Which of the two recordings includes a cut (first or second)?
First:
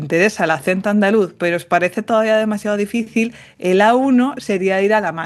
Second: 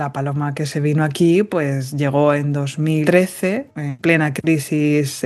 second